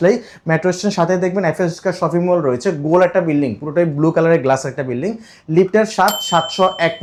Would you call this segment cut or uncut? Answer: uncut